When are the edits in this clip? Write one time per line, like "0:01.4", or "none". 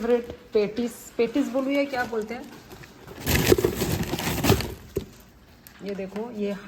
none